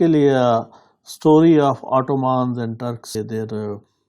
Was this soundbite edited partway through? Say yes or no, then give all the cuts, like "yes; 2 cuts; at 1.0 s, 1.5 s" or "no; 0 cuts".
yes; 1 cut; at 3.1 s